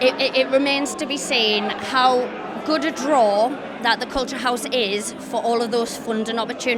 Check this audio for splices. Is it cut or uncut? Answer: uncut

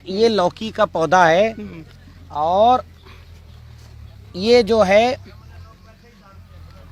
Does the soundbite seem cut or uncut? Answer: uncut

